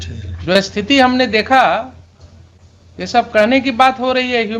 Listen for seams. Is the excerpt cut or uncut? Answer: uncut